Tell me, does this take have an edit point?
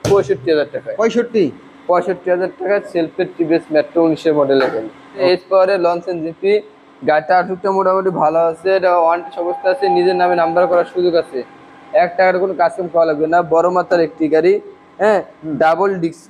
no; 0 cuts

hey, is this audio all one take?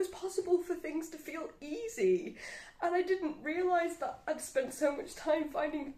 yes; 0 cuts

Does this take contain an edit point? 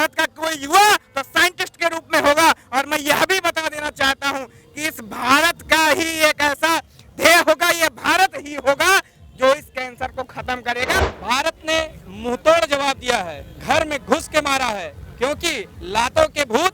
yes; 1 cut; at 11.0 s

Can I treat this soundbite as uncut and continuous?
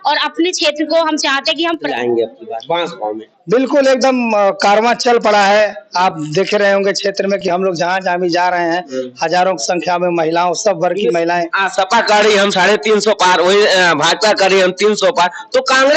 no; 1 cut; at 1.8 s

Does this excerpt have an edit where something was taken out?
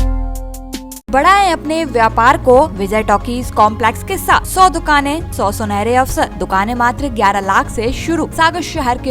yes; 6 cuts; at 1.1 s, 2.8 s, 4.5 s, 5.3 s, 6.4 s, 8.3 s

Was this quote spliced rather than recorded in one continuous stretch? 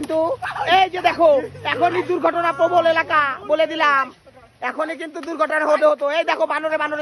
no; 0 cuts

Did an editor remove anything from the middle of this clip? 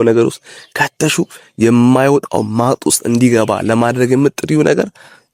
no; 0 cuts

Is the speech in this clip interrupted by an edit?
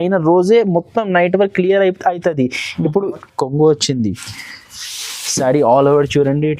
yes; 1 cut; at 3.3 s

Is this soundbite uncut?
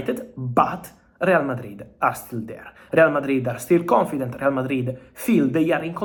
yes; 0 cuts

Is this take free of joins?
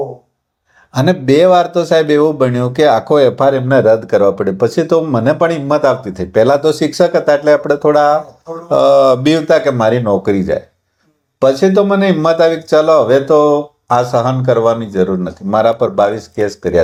yes; 0 cuts

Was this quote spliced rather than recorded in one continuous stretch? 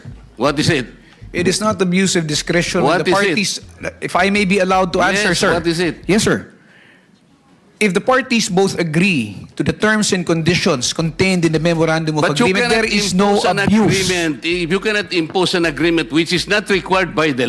no; 0 cuts

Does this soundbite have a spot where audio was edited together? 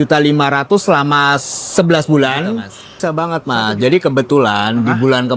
yes; 1 cut; at 3.0 s

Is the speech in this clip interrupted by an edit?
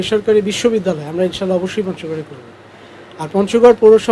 no; 0 cuts

